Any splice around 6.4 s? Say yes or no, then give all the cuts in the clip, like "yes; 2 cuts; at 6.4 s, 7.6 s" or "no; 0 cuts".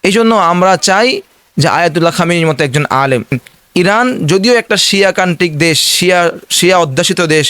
no; 1 cut; at 3.5 s